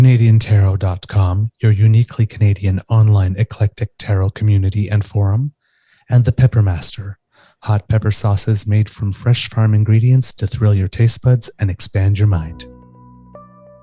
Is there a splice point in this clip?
yes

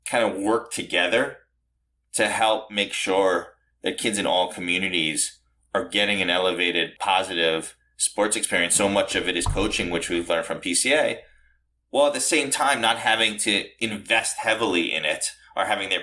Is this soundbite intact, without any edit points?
no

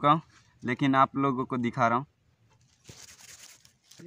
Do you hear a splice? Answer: yes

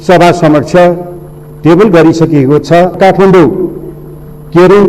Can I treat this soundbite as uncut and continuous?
no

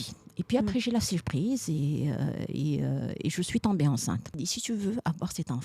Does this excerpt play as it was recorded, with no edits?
no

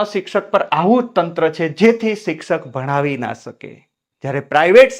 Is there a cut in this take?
no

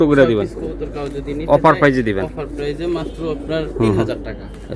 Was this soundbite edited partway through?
no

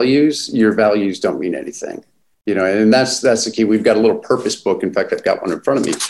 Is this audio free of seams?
yes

